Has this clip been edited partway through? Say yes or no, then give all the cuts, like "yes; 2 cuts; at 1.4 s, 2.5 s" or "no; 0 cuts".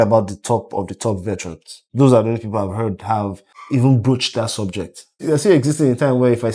yes; 3 cuts; at 1.8 s, 3.5 s, 5.2 s